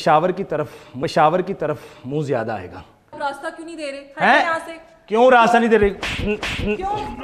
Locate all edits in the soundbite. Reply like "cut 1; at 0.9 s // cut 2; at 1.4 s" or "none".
cut 1; at 2.6 s